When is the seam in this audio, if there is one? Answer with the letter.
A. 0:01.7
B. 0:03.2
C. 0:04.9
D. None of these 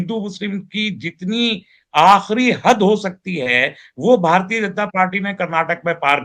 D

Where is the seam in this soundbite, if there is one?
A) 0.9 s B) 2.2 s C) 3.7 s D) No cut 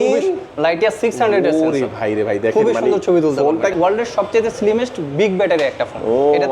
C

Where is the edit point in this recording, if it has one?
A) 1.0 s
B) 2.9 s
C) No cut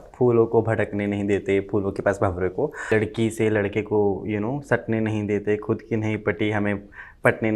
B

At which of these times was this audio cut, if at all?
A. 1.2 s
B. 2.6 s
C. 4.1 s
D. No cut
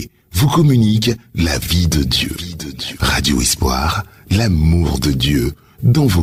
D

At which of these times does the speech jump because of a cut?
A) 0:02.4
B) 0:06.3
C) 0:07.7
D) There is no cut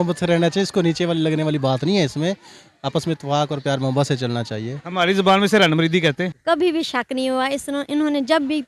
B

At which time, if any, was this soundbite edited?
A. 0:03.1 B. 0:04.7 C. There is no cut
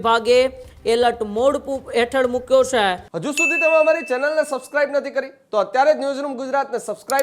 A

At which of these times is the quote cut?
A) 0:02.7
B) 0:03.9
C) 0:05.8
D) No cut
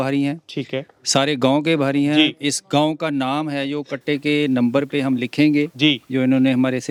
D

